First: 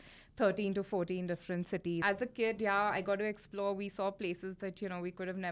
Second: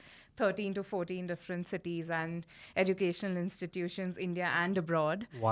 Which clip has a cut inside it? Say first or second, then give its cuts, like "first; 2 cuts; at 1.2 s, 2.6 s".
first; 1 cut; at 2.0 s